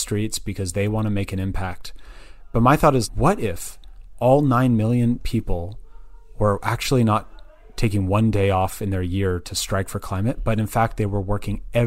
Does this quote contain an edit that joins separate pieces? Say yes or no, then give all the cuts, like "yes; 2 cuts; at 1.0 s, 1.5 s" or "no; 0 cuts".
no; 0 cuts